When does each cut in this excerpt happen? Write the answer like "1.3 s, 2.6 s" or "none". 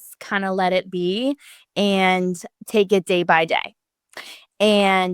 2.5 s